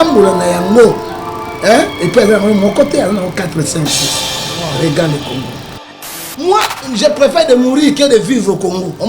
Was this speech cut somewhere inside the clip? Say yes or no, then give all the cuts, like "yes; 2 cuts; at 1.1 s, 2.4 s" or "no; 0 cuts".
yes; 1 cut; at 6.2 s